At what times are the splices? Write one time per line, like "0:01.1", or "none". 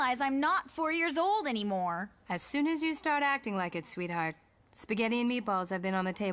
0:03.0